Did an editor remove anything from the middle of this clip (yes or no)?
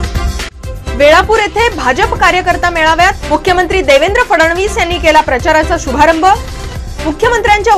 no